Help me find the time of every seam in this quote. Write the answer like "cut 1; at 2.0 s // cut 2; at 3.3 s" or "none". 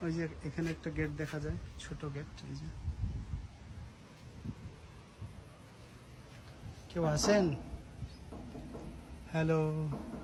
none